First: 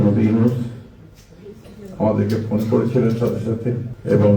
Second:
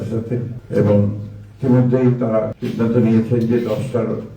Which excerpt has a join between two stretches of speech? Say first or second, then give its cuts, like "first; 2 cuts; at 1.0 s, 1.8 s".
second; 1 cut; at 2.6 s